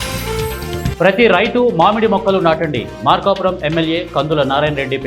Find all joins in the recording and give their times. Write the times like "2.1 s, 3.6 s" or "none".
0.9 s